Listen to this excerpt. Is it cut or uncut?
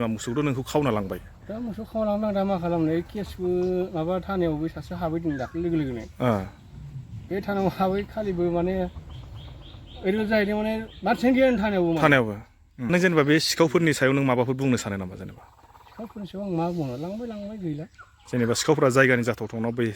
cut